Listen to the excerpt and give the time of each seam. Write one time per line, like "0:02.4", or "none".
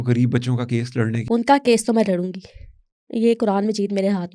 0:01.2